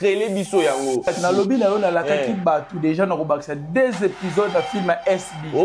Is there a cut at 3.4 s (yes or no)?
no